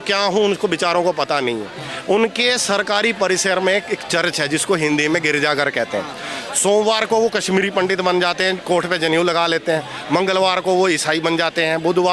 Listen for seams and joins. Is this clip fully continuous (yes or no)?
yes